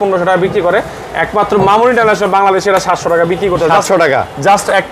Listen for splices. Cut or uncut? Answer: uncut